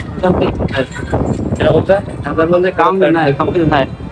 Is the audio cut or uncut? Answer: uncut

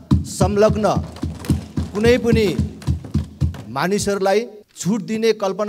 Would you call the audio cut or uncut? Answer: cut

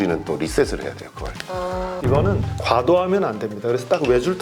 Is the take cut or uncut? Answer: cut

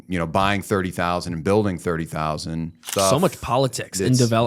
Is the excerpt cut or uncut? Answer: cut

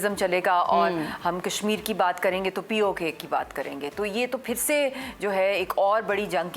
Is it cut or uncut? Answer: uncut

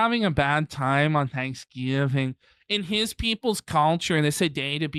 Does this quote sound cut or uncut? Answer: uncut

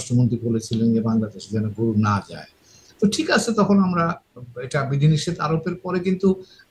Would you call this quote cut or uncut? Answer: uncut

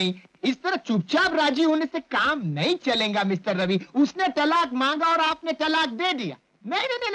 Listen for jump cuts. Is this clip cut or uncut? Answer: uncut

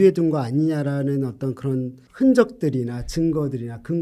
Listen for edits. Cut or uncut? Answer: cut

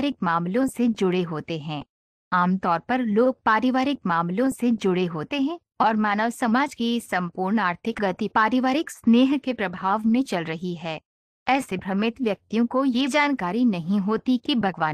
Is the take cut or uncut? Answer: uncut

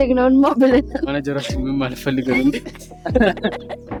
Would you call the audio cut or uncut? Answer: uncut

